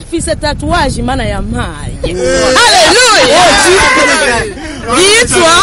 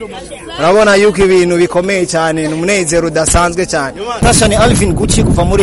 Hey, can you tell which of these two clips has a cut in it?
second; 1 cut; at 4.2 s

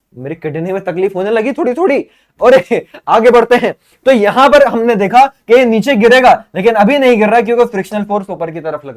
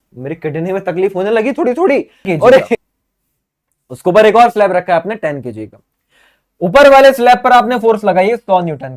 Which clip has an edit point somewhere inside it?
second; 1 cut; at 2.8 s

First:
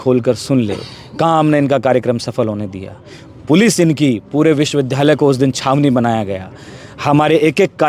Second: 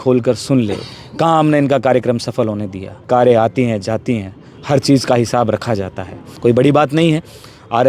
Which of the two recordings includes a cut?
second; 2 cuts; at 3.1 s, 6.2 s

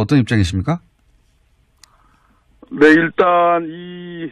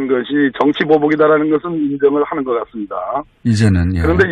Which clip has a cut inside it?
second; 1 cut; at 2.5 s

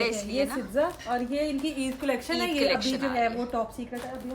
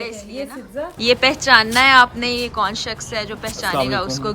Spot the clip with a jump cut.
second; 1 cut; at 0.9 s

